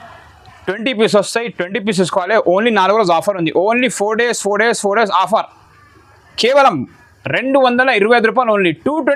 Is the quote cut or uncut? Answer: uncut